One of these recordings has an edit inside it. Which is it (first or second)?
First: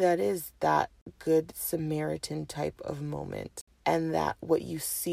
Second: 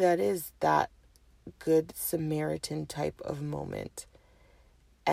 first